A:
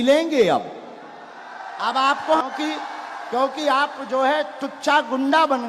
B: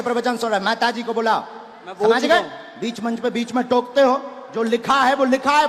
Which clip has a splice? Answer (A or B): A